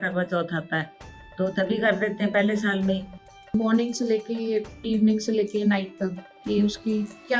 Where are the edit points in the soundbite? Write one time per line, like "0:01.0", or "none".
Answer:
0:03.5